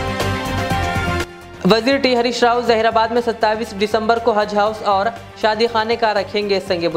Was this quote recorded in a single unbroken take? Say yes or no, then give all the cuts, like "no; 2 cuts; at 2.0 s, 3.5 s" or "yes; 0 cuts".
no; 1 cut; at 1.4 s